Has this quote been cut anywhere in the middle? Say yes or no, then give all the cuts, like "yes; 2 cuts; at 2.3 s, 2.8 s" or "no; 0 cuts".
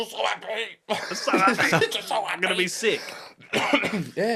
no; 0 cuts